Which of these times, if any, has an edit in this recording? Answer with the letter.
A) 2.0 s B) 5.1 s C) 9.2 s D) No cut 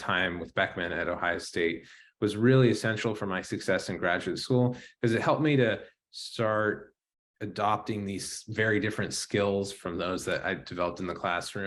D